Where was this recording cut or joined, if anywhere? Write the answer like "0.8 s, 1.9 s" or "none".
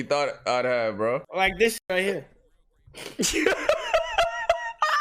1.3 s